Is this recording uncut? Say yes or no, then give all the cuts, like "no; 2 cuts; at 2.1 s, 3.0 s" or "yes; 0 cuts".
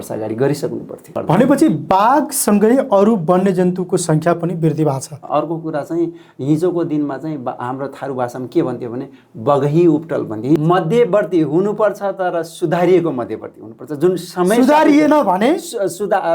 no; 3 cuts; at 1.2 s, 5.3 s, 10.6 s